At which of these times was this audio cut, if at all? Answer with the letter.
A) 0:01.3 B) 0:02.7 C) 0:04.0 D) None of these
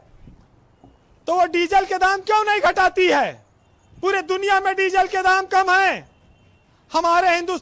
D